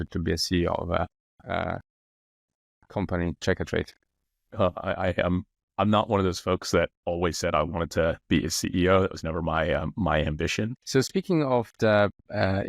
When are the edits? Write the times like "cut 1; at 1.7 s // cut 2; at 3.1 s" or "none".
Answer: cut 1; at 10.8 s